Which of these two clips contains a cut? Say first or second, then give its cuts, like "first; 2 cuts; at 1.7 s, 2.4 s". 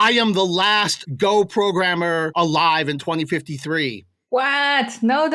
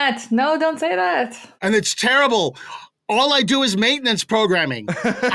first; 2 cuts; at 1.0 s, 2.3 s